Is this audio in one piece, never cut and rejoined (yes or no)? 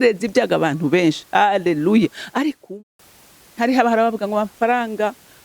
no